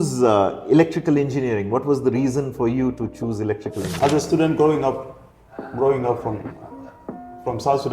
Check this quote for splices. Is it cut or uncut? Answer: cut